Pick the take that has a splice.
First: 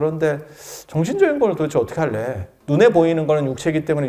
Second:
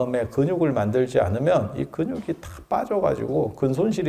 first; 1 cut; at 2.5 s

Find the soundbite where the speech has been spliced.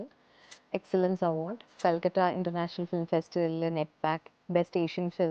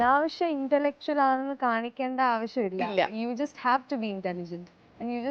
first; 1 cut; at 1.7 s

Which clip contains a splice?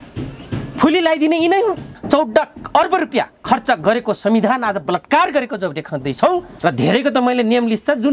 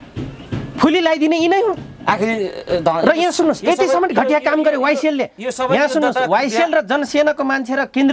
first; 2 cuts; at 1.9 s, 6.5 s

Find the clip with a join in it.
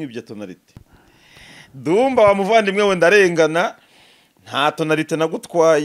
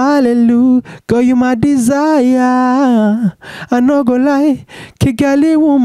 first; 1 cut; at 0.9 s

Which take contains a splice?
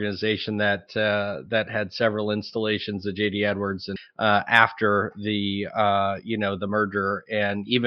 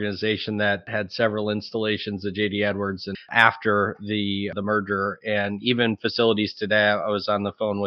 second; 3 cuts; at 0.9 s, 3.3 s, 4.5 s

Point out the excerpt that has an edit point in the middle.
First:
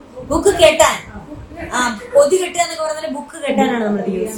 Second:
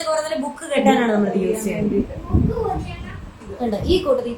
second; 1 cut; at 3.4 s

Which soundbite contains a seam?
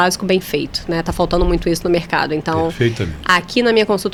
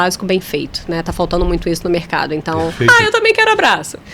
second; 1 cut; at 2.9 s

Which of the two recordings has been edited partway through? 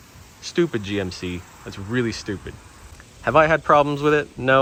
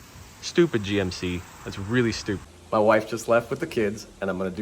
second; 1 cut; at 2.5 s

